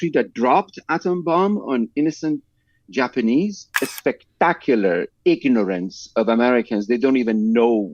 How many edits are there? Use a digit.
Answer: 1